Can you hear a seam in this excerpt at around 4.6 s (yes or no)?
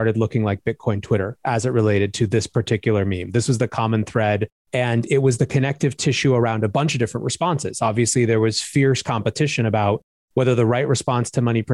yes